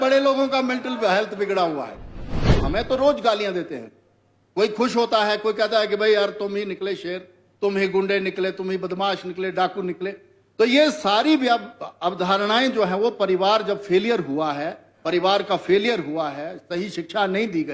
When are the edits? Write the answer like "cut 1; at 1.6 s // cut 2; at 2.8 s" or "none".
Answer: cut 1; at 2.5 s